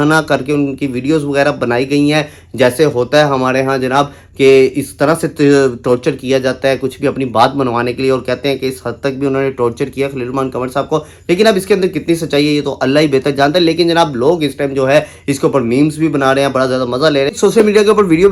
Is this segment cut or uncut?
uncut